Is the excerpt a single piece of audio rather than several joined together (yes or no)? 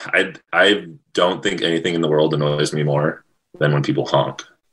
yes